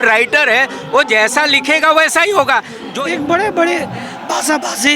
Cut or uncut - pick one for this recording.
cut